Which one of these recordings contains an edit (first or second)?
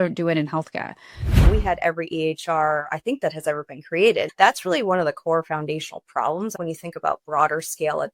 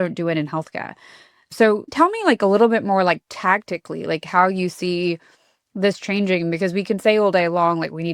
first